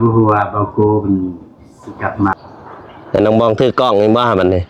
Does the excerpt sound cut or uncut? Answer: cut